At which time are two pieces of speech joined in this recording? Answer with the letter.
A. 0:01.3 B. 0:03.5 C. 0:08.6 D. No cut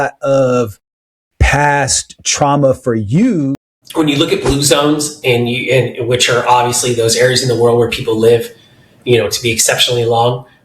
B